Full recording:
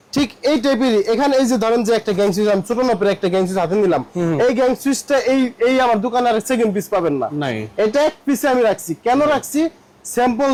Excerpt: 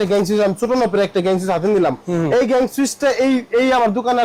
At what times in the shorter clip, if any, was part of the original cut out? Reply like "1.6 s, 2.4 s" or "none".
none